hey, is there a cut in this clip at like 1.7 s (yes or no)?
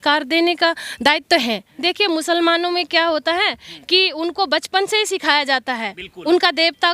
yes